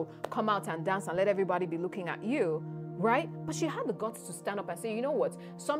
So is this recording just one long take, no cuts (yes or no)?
yes